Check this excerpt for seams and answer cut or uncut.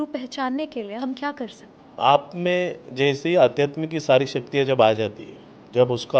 cut